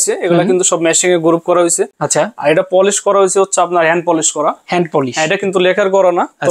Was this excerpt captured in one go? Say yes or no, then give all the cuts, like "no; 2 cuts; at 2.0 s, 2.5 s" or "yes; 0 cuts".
yes; 0 cuts